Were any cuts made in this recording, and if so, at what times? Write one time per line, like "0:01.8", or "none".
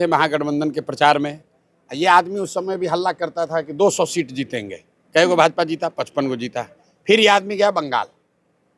none

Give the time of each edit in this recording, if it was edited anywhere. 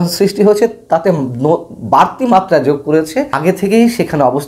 0:03.3

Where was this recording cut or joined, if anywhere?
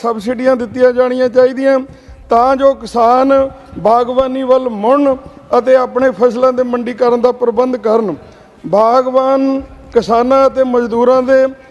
none

